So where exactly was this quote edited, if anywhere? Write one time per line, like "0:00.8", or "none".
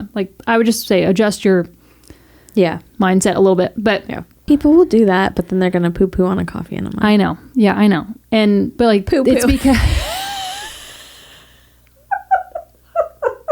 0:04.5
0:08.7